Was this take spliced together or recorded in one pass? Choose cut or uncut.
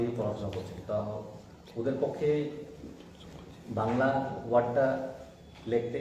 uncut